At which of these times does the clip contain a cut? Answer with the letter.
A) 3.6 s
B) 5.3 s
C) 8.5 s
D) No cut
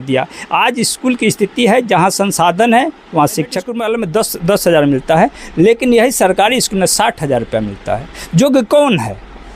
A